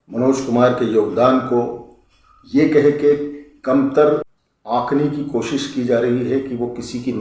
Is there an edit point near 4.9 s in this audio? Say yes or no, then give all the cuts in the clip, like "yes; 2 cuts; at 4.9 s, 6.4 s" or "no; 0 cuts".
yes; 1 cut; at 4.9 s